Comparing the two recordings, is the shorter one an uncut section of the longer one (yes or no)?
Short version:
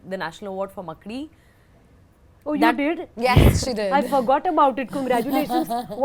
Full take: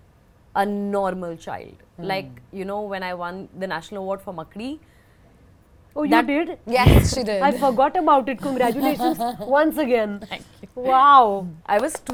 yes